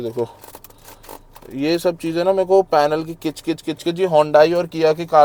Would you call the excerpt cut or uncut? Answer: uncut